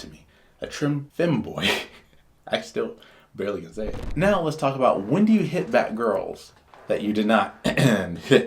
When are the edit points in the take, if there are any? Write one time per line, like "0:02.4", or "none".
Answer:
0:04.0